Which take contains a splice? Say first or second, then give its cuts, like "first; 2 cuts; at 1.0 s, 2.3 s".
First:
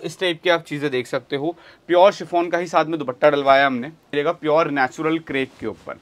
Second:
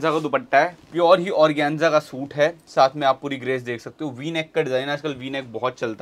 first; 1 cut; at 4.1 s